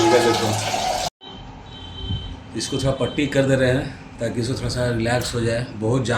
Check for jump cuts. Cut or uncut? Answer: cut